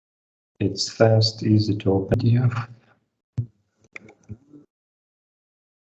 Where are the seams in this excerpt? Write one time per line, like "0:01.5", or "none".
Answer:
0:02.1